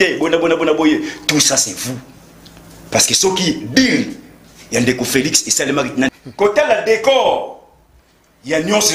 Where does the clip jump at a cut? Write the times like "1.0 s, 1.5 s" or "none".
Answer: 6.1 s